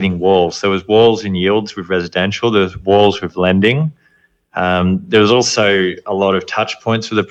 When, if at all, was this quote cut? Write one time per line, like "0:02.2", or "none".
none